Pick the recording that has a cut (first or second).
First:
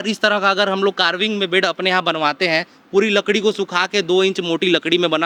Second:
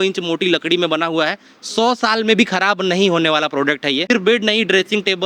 second